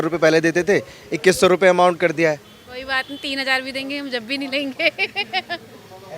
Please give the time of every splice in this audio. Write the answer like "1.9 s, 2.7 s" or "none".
none